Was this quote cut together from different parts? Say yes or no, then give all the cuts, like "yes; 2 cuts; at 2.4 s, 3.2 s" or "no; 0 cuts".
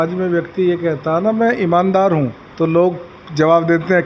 yes; 1 cut; at 2.4 s